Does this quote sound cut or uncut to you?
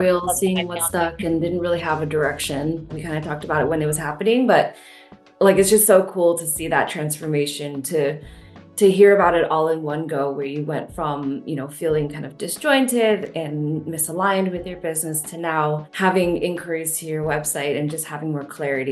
cut